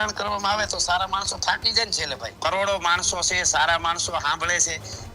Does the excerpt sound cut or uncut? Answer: cut